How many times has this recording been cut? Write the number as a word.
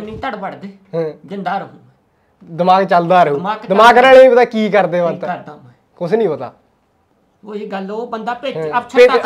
zero